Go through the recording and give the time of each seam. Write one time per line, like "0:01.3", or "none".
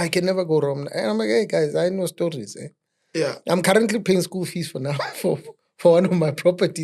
none